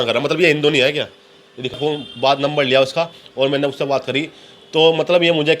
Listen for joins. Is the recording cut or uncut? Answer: cut